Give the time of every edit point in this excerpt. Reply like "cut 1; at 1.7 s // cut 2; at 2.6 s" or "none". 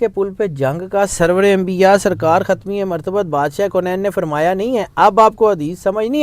none